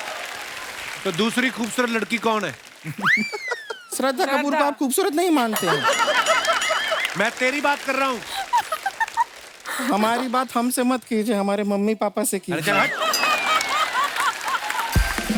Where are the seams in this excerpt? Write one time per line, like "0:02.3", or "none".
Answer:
none